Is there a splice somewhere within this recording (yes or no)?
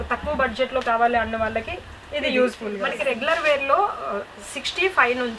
yes